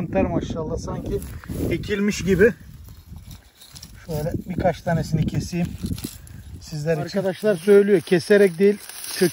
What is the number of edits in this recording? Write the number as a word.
one